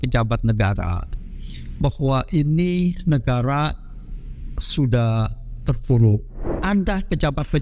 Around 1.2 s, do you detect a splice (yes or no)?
no